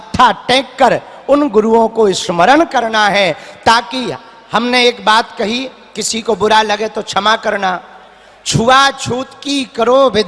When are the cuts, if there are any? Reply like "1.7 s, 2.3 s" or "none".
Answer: none